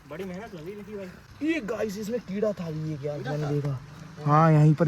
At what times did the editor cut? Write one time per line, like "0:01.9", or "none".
0:01.2